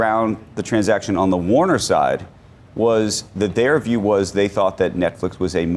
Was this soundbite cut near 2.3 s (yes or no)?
no